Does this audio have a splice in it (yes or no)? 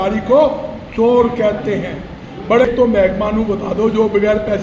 yes